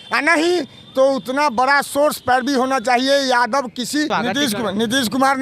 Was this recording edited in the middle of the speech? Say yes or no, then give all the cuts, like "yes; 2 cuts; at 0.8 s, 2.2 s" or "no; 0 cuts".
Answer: yes; 1 cut; at 4.1 s